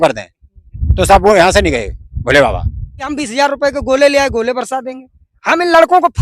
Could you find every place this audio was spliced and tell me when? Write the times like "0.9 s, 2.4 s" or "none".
3.2 s

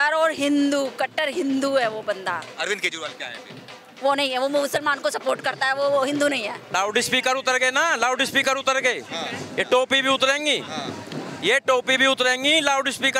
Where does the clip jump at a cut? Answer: 6.7 s

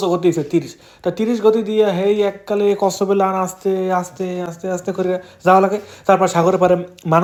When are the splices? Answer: none

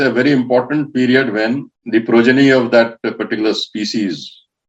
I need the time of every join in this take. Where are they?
1.7 s

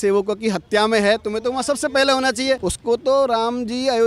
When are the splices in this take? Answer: 2.7 s

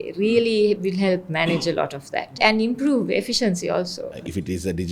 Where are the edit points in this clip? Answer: 2.4 s, 4.2 s

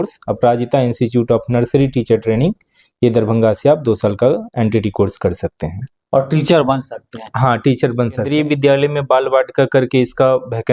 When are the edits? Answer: 8.3 s

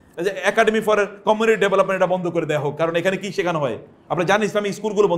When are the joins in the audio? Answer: none

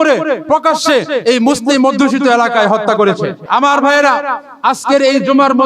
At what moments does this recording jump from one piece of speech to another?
3.4 s

